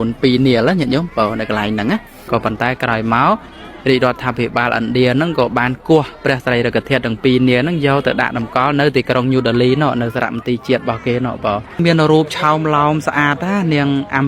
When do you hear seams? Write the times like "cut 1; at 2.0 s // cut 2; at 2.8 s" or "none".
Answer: cut 1; at 2.3 s // cut 2; at 11.8 s